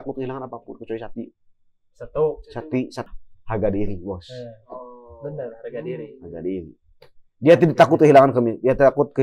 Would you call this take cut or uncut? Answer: cut